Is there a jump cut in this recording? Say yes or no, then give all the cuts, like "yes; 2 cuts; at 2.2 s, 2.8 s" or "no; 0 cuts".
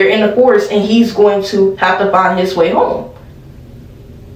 no; 0 cuts